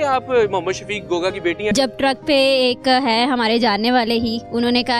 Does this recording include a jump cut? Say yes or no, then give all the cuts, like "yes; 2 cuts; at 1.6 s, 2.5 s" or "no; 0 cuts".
yes; 1 cut; at 1.7 s